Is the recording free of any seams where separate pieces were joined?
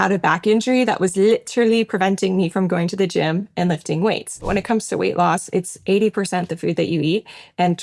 no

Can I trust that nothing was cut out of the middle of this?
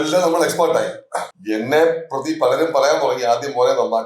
no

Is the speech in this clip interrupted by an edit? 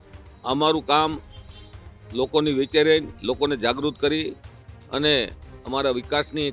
no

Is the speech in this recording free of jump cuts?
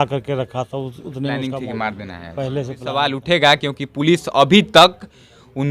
no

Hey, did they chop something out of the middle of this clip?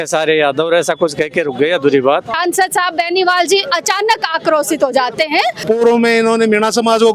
yes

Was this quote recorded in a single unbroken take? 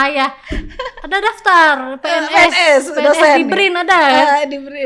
yes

